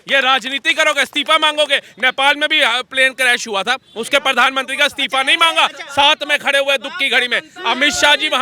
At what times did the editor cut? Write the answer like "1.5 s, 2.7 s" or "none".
none